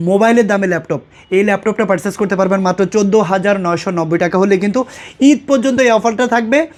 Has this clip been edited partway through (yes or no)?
no